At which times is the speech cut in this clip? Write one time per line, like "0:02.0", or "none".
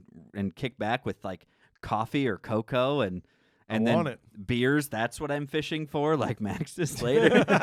none